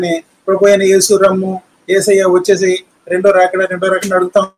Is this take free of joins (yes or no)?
yes